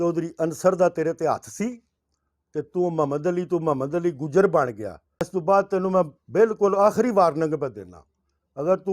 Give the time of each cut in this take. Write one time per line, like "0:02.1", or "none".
0:05.3